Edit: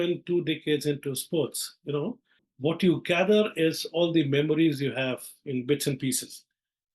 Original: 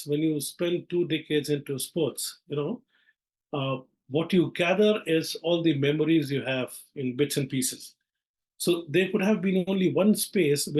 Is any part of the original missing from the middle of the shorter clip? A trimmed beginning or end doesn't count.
yes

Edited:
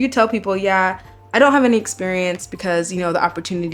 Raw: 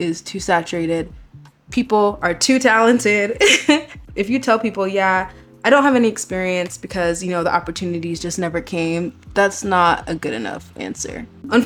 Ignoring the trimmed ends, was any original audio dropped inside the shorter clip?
no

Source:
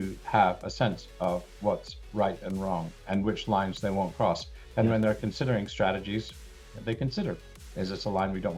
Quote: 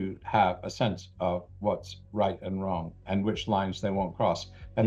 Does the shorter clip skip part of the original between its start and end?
no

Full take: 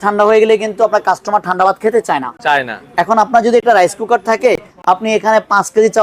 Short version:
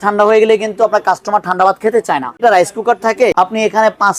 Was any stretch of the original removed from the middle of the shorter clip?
yes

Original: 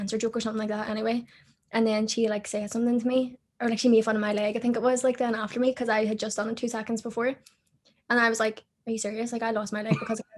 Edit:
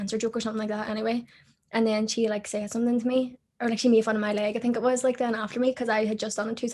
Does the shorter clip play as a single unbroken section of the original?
yes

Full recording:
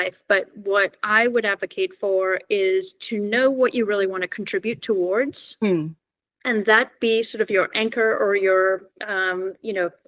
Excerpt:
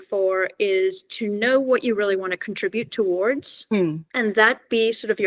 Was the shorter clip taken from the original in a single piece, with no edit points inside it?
no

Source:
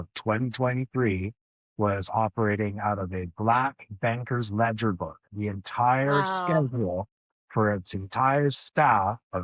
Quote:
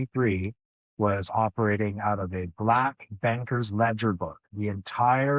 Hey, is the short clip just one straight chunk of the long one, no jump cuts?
yes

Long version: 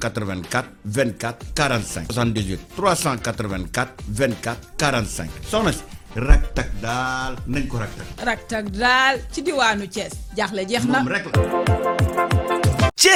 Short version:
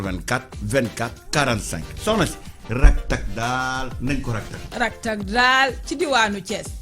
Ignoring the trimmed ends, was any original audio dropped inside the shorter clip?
yes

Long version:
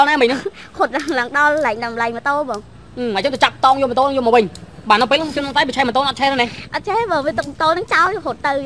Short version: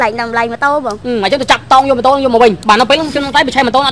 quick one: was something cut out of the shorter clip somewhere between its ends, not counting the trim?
yes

